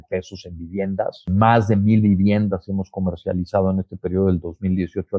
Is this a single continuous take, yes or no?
no